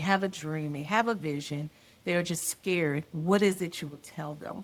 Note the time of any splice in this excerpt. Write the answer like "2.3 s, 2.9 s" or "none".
none